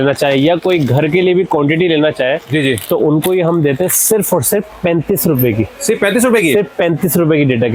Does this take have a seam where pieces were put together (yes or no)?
no